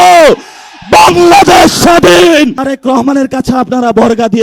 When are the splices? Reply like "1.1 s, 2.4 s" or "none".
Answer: 2.7 s